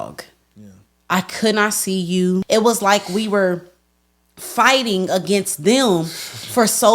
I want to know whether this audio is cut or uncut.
cut